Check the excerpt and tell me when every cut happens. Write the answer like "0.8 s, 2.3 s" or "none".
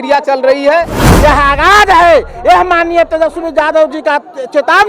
1.0 s